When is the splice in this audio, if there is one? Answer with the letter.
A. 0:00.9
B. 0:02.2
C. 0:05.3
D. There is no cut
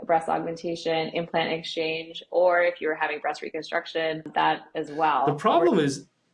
C